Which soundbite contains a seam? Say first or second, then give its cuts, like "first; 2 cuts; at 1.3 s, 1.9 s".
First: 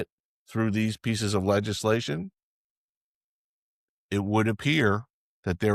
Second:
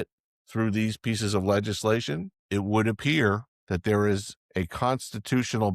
second; 3 cuts; at 2.3 s, 3.5 s, 4.4 s